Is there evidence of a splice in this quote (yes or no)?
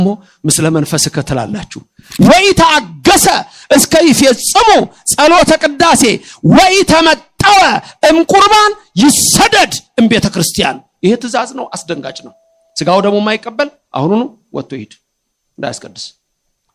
yes